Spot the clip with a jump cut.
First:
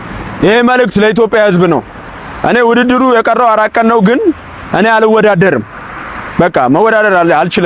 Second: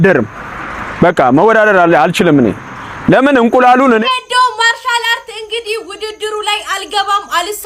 second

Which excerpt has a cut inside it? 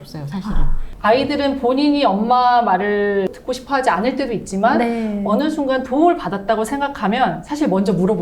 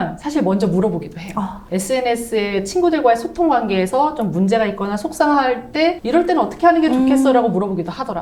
first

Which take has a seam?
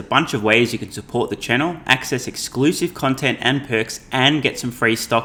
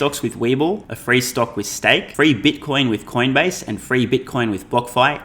second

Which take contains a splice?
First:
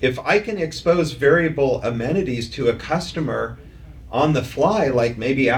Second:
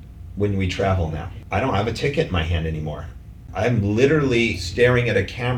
second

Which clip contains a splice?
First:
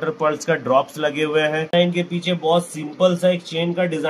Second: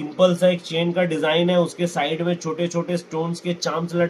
first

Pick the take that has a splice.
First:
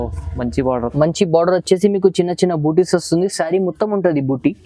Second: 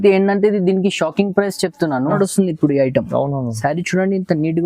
second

